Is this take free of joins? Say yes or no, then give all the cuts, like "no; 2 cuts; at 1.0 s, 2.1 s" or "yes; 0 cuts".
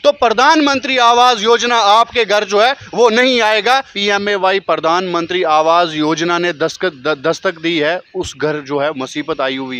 no; 1 cut; at 3.9 s